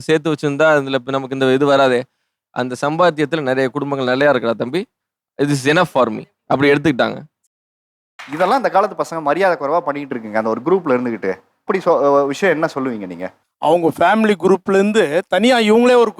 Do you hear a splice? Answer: yes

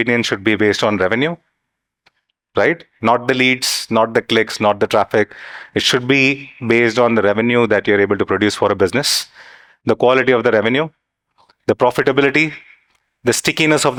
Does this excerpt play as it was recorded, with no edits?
yes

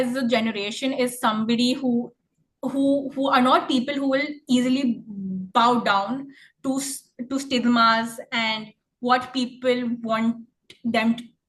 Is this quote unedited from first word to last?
yes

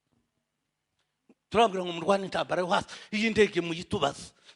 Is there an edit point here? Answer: no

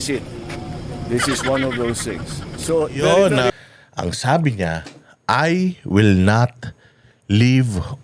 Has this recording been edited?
yes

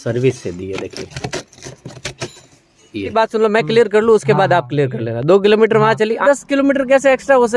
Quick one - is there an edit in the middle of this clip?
yes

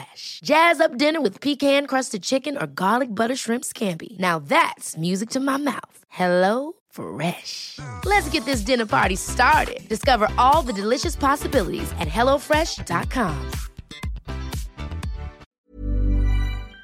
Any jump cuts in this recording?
yes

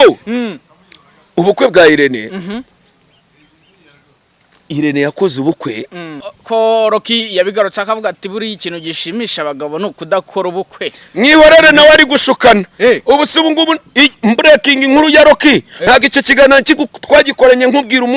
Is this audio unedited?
no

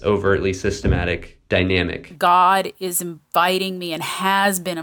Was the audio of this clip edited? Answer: yes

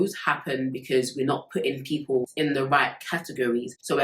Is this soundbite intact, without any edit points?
no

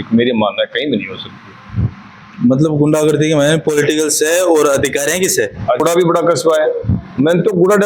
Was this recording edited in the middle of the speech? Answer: yes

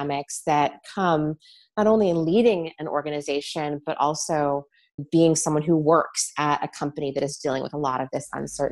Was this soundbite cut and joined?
no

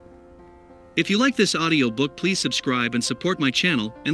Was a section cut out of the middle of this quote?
yes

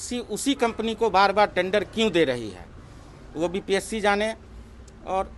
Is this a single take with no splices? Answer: yes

